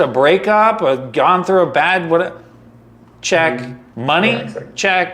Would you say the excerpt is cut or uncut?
cut